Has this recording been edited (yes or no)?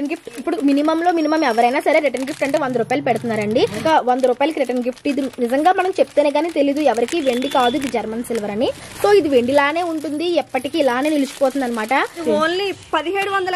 yes